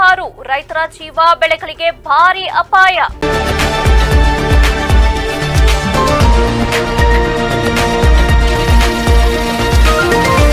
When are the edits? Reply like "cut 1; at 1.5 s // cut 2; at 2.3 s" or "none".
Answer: cut 1; at 3.1 s